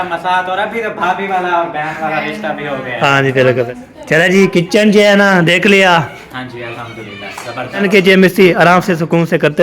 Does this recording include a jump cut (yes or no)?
yes